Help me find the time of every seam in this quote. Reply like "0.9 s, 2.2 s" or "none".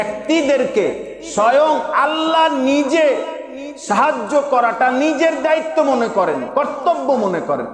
none